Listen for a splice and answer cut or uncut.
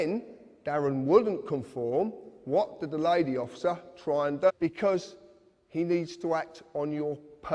uncut